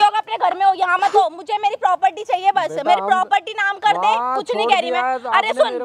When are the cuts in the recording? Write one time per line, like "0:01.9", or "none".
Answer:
none